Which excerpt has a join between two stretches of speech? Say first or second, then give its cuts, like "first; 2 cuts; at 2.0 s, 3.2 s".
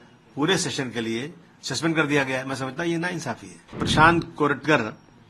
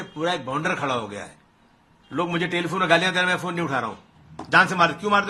first; 1 cut; at 3.8 s